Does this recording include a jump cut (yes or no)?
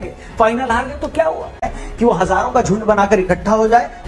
yes